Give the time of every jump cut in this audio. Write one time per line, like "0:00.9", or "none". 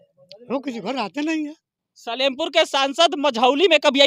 none

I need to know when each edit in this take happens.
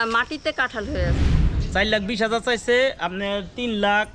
0:01.2

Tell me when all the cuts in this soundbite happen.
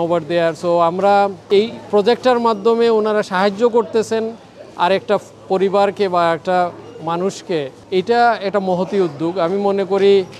0:01.4
0:07.8

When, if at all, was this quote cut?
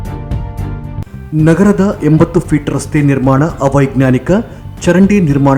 0:01.0

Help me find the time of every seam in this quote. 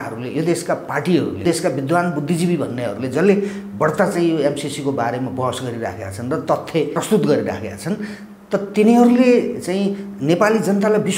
0:01.4
0:06.9

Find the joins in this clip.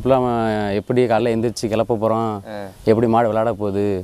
none

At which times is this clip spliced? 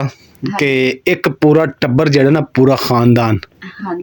none

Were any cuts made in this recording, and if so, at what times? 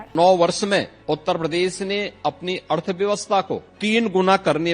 0:00.9
0:03.7

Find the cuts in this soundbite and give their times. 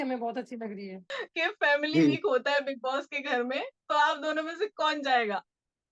0:01.2

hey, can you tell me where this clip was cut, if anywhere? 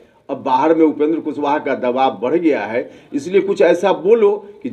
none

